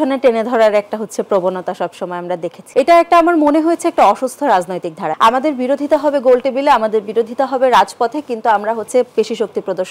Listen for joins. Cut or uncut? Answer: cut